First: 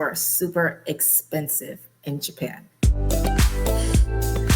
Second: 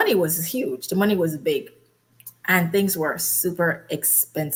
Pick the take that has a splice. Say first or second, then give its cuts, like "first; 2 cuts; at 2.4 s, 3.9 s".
first; 1 cut; at 2.6 s